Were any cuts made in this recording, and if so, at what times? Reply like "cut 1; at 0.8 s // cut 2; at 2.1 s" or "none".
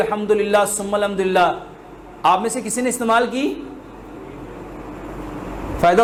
none

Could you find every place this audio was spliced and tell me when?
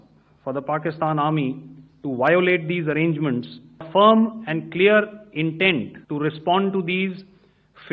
cut 1; at 3.9 s // cut 2; at 6.0 s

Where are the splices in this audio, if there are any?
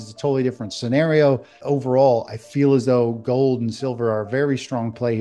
cut 1; at 1.6 s

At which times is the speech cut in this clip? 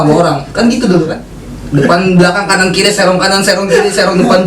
cut 1; at 1.2 s

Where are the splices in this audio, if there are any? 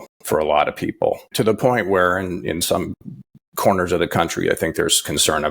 cut 1; at 1.2 s

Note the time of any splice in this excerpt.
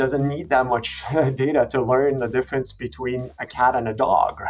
none

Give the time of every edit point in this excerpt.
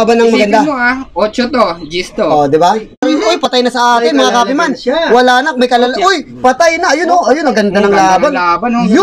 cut 1; at 3.3 s

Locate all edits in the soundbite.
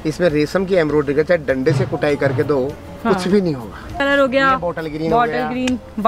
cut 1; at 4.0 s

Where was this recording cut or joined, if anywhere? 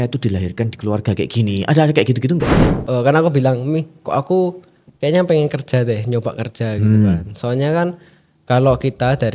cut 1; at 2.7 s

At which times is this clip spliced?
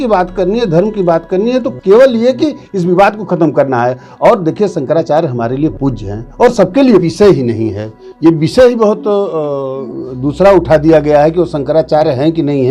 cut 1; at 7.1 s

